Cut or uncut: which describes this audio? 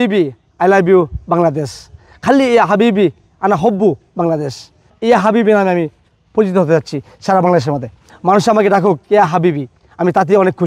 cut